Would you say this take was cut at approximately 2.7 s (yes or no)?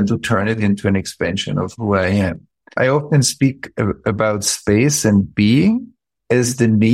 yes